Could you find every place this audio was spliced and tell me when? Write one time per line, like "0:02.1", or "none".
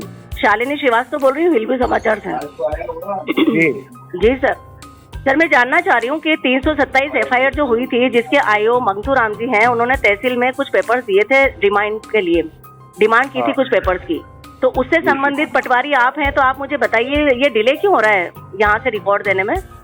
none